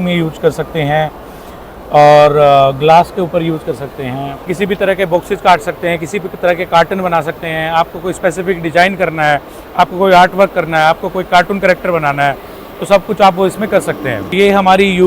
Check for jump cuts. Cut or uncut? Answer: cut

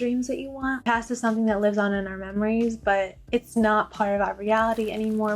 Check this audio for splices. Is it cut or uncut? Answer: cut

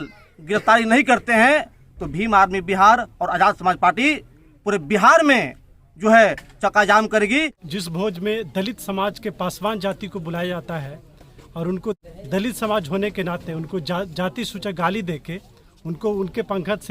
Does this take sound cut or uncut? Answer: cut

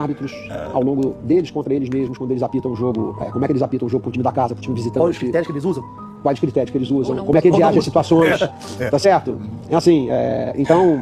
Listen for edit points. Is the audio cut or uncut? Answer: uncut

